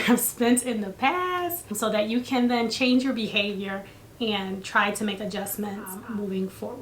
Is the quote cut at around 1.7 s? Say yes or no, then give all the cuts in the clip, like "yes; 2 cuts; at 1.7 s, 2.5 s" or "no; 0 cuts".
yes; 2 cuts; at 1.7 s, 5.9 s